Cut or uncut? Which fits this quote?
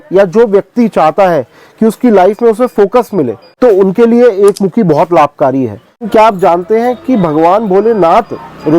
cut